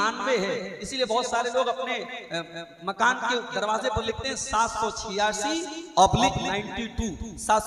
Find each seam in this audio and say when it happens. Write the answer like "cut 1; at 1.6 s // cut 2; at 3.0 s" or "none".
none